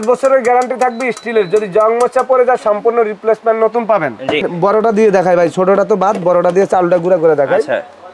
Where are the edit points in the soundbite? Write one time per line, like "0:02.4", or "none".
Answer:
0:04.5